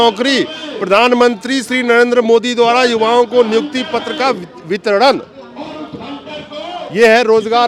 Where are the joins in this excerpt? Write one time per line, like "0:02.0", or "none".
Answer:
none